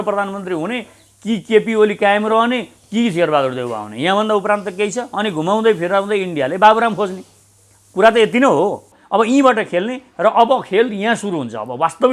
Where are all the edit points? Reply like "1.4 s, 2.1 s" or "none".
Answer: 8.9 s